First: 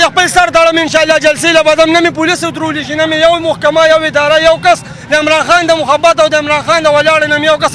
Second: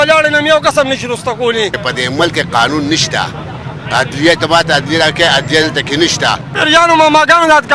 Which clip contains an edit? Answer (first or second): second